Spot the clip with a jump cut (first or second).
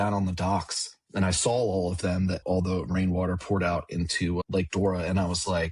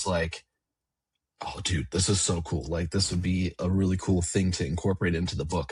first